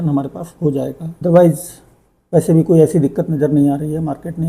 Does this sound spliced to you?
yes; 1 cut; at 1.1 s

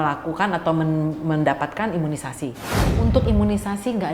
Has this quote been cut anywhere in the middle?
yes; 1 cut; at 2.8 s

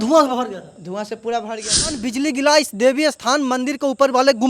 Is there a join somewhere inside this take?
yes; 1 cut; at 2.1 s

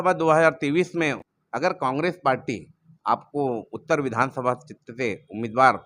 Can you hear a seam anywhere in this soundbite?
yes; 1 cut; at 1.2 s

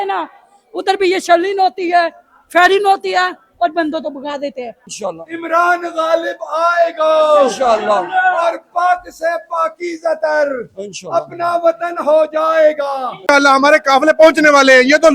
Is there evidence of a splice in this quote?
yes; 2 cuts; at 4.9 s, 13.2 s

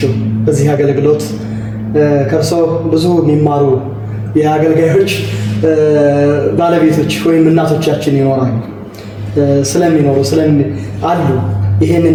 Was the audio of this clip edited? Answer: no; 0 cuts

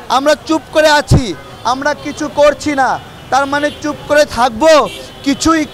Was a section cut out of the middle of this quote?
no; 0 cuts

